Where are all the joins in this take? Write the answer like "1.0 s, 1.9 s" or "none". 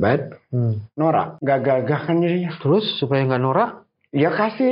1.3 s